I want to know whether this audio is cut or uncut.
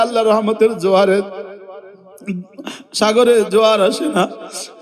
uncut